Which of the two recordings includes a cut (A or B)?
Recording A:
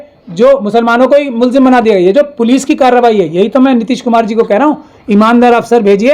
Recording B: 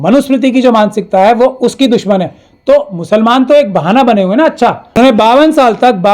B